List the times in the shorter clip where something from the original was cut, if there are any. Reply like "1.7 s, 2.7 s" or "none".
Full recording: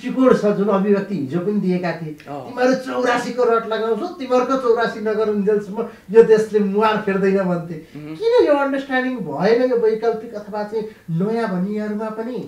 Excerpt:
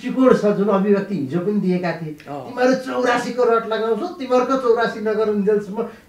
none